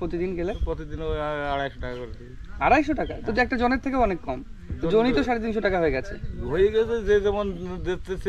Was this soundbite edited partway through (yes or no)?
no